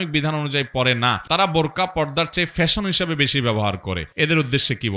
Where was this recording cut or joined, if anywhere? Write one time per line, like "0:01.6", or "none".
0:01.2
0:04.1

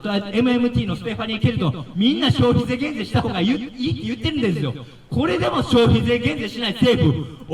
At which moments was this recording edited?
none

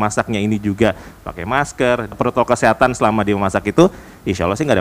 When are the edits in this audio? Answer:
0:02.1

